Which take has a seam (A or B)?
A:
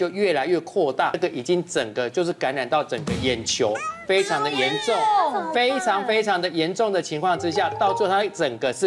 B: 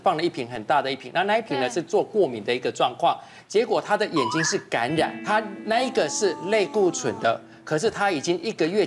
A